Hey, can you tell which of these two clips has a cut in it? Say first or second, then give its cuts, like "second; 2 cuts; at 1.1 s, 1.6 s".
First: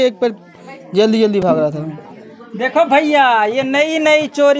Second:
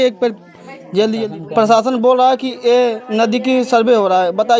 second; 1 cut; at 1.2 s